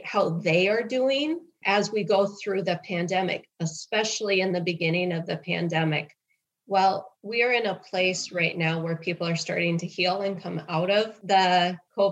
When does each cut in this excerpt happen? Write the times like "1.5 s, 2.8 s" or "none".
7.1 s, 11.2 s